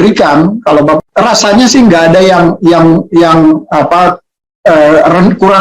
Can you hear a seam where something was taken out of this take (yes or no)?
yes